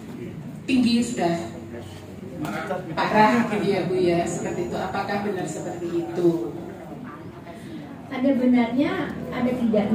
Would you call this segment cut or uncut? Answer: uncut